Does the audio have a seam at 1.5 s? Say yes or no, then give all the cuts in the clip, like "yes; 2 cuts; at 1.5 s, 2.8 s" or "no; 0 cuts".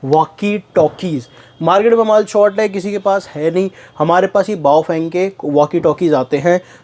no; 0 cuts